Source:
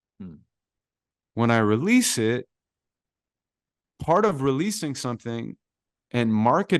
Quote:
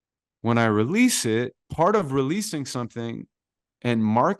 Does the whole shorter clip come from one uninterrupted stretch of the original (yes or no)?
no